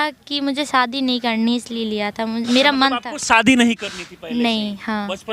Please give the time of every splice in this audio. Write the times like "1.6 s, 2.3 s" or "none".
none